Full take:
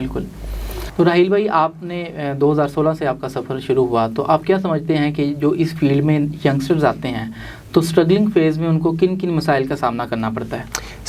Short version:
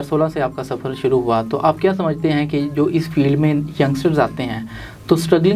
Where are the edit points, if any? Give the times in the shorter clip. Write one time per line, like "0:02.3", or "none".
none